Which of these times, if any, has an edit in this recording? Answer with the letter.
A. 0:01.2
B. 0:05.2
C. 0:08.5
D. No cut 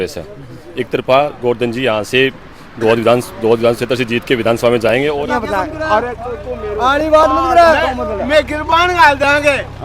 B